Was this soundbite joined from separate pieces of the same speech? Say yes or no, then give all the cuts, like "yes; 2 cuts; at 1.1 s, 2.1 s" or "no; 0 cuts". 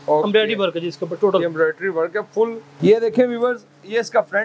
yes; 1 cut; at 2.6 s